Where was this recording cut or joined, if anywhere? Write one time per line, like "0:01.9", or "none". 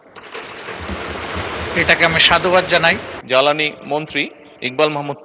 0:03.1

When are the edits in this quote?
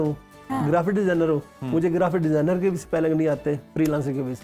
none

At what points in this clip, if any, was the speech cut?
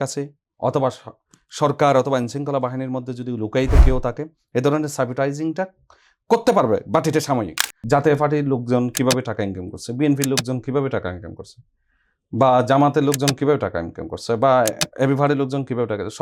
0:07.8

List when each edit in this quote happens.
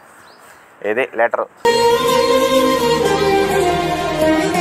none

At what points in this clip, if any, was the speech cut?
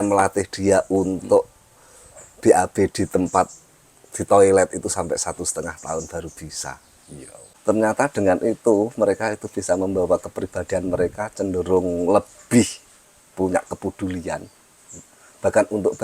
0:07.5

